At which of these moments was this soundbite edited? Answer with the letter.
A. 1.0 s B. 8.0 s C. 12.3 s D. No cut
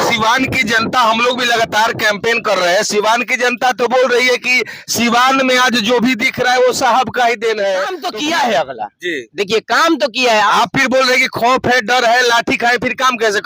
B